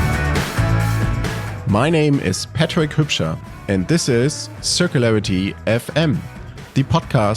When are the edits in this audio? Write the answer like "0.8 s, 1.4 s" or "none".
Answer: 0.9 s